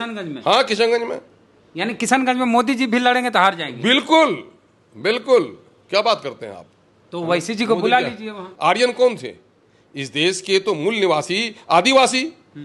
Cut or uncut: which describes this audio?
cut